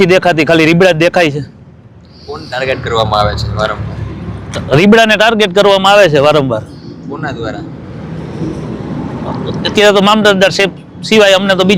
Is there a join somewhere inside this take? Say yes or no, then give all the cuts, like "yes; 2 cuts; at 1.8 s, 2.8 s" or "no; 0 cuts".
no; 0 cuts